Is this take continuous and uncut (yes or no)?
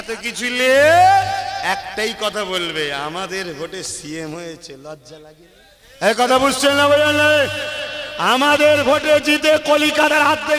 no